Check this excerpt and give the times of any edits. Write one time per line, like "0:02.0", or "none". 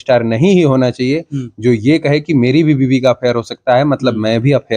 none